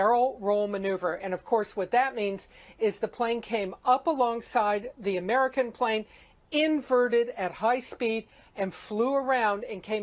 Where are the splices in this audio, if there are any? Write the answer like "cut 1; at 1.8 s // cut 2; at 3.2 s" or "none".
cut 1; at 2.3 s